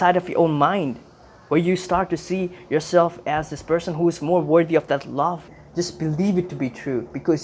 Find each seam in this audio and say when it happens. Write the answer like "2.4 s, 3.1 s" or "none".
5.6 s